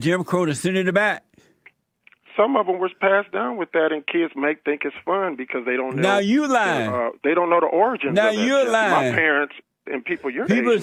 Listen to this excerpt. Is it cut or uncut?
uncut